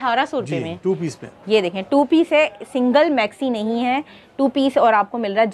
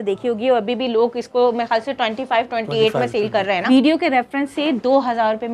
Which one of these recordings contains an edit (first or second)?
second